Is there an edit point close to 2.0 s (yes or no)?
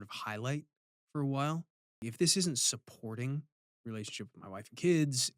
yes